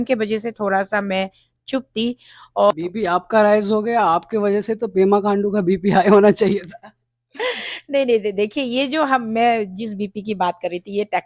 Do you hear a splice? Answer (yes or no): yes